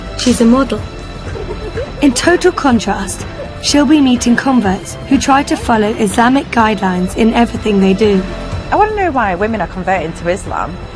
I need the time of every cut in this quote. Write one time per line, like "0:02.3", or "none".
0:09.0